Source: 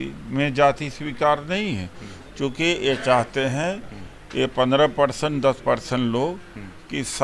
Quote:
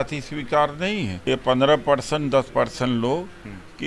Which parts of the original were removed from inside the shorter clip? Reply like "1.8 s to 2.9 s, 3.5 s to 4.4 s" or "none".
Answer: 1.8 s to 4.2 s

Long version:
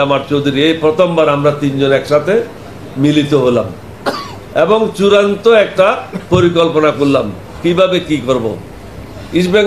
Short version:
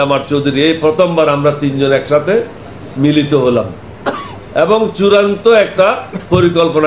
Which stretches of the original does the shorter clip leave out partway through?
none

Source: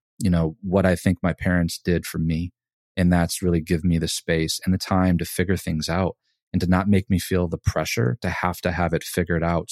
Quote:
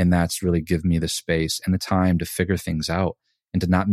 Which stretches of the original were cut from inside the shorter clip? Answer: none

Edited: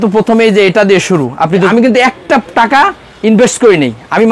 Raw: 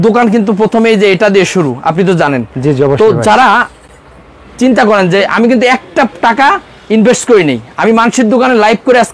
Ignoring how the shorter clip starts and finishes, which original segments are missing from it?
2.1 s to 5.4 s

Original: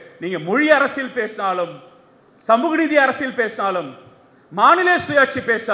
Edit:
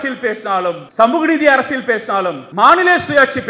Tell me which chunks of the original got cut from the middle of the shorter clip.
1.8 s to 2.3 s, 3.9 s to 4.4 s

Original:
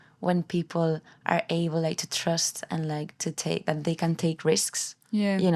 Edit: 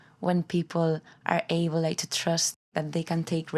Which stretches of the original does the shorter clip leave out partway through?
2.7 s to 3.6 s

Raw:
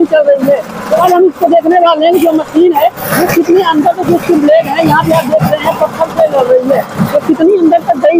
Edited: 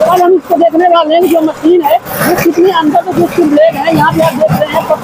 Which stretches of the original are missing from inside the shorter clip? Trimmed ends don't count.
none

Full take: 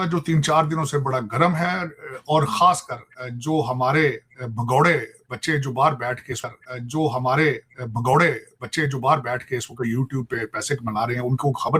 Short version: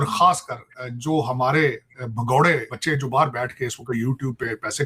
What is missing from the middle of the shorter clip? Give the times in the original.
5.1 s to 8.6 s

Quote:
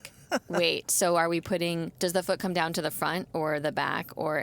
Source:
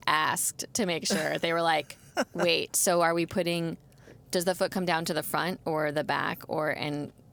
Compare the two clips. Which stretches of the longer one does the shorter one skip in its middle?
3.8 s to 4.2 s

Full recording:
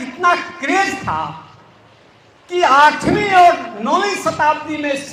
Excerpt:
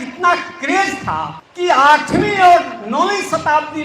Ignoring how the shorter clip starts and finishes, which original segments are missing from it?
1.4 s to 2.3 s

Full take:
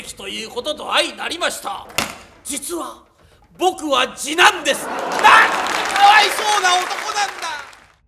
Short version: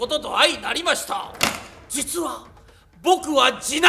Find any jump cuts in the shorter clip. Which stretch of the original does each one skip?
none

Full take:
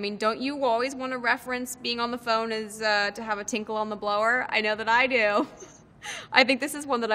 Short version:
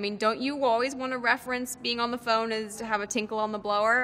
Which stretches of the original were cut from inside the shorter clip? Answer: 2.8 s to 3.1 s

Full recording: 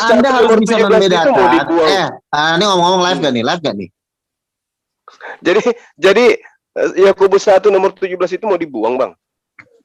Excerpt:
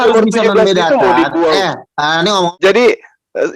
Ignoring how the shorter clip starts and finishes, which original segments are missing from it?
2.8 s to 5.9 s

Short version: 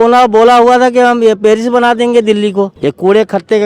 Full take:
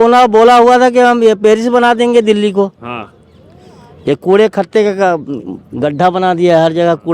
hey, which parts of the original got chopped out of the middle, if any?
2.7 s to 4.0 s

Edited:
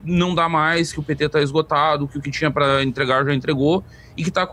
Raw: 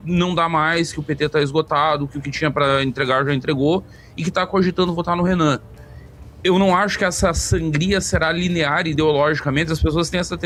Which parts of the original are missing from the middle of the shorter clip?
none

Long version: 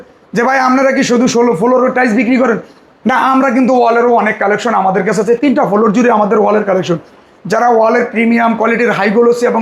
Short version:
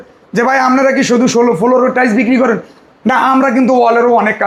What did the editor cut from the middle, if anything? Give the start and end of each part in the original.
none

